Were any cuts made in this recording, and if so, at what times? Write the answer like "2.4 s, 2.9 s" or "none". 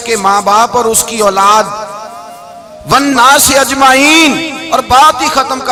none